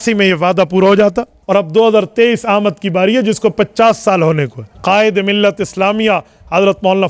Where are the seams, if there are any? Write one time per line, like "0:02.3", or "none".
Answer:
0:01.3
0:04.6

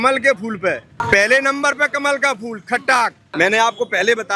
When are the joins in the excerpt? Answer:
0:01.0
0:03.2

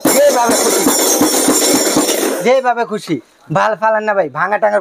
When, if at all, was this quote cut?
none

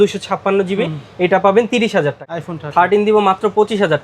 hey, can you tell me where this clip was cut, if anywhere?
0:01.8

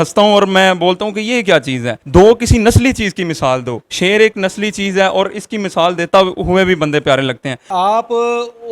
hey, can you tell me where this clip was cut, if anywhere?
0:02.0
0:07.7

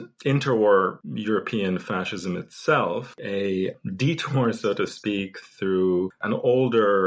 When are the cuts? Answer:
0:01.0
0:03.2
0:06.2

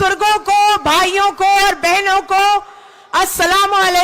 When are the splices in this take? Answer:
none

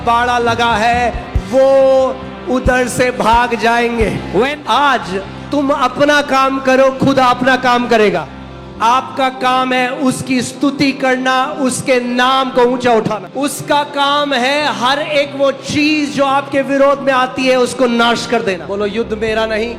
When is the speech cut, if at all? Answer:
0:04.5
0:08.3
0:13.2
0:18.6

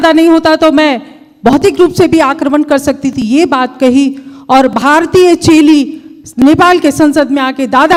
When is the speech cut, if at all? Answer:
none

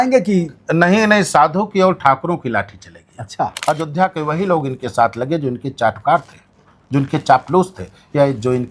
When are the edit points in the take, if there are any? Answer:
0:03.5

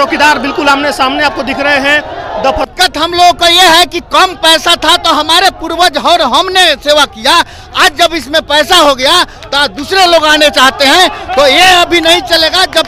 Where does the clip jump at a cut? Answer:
0:02.7

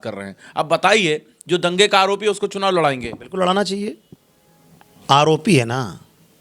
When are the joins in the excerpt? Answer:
none

